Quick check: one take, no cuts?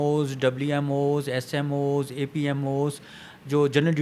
yes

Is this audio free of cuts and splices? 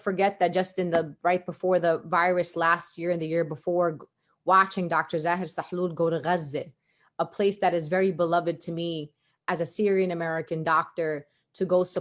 yes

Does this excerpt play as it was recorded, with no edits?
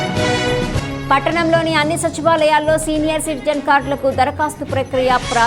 no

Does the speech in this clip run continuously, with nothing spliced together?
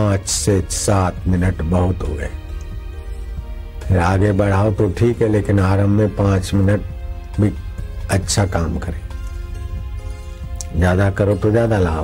yes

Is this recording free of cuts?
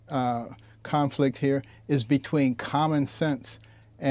yes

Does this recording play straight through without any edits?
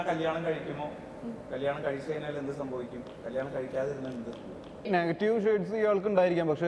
no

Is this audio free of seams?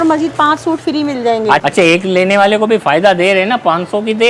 no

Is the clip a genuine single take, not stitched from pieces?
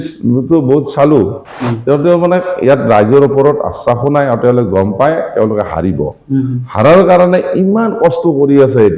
no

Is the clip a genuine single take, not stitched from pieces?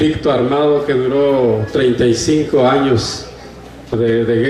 no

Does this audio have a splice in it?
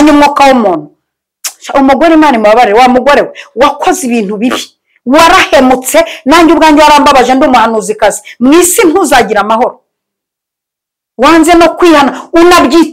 no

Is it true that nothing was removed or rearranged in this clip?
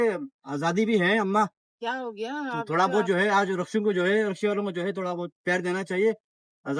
yes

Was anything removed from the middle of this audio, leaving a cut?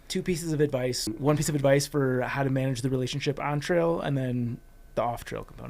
yes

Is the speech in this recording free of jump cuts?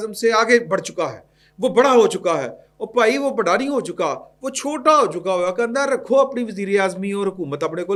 yes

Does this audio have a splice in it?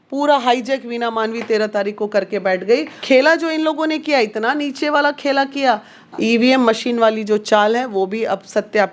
yes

